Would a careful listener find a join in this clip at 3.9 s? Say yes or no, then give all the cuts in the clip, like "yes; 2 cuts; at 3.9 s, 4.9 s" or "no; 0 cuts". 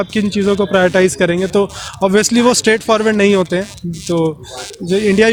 no; 0 cuts